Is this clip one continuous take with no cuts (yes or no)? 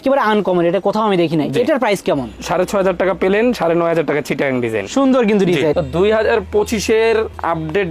no